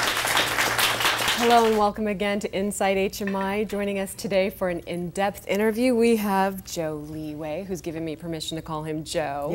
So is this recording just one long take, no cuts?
no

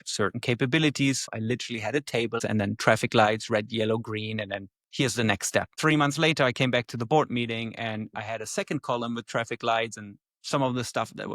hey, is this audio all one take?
no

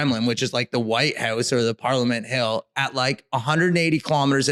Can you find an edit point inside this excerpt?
no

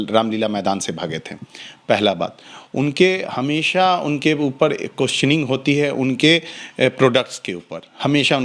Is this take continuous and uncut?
yes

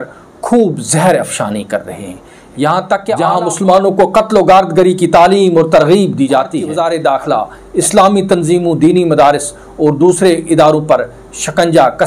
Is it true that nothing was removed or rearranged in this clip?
no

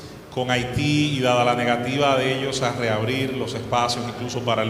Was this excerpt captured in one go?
yes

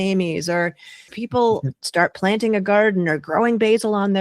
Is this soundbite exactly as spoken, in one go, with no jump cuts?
no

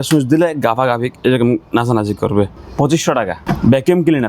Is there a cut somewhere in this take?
yes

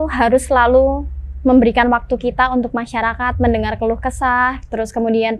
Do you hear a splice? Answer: no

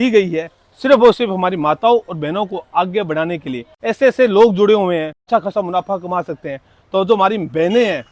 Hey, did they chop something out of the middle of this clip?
yes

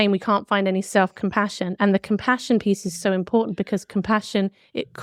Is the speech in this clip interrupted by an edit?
no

